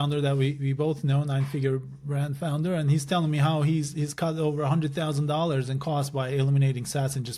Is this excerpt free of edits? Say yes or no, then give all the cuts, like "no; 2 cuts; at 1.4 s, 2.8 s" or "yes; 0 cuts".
yes; 0 cuts